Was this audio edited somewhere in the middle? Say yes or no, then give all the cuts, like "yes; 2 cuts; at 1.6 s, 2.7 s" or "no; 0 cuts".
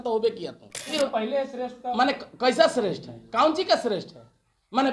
yes; 1 cut; at 0.9 s